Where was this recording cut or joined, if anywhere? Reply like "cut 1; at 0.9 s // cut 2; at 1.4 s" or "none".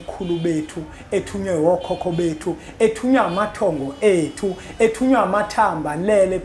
none